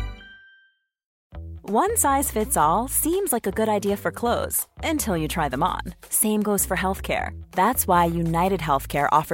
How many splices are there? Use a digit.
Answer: 1